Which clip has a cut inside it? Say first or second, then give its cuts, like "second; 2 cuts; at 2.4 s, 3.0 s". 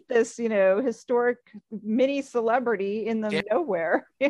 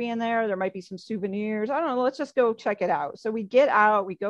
first; 1 cut; at 3.4 s